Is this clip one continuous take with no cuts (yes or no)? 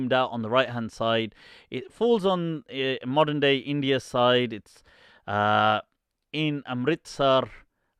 yes